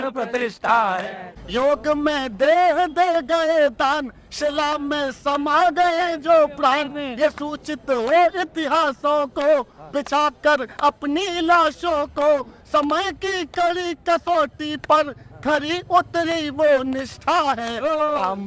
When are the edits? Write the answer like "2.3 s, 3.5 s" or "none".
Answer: 1.2 s